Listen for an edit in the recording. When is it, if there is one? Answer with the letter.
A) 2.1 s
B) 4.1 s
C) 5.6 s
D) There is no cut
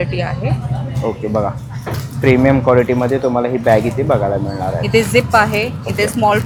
D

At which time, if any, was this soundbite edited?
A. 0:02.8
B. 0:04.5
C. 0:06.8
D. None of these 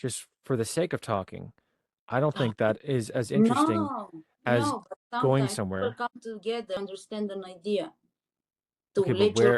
C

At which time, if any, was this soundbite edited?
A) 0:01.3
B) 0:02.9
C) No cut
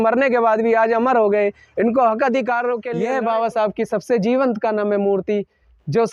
B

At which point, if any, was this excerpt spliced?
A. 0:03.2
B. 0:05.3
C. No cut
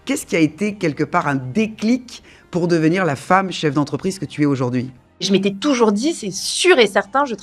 B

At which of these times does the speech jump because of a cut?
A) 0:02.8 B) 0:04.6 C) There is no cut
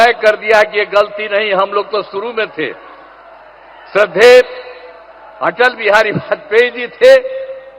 C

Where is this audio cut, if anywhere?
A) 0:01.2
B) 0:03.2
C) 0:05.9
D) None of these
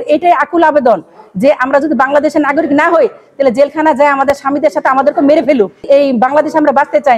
C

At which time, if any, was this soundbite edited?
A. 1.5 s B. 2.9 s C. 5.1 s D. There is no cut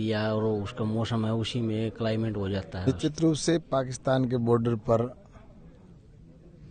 B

